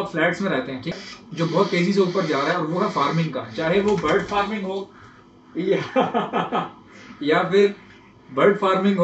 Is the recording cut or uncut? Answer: cut